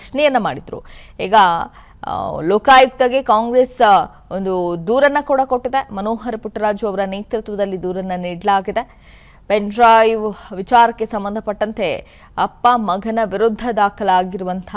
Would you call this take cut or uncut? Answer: cut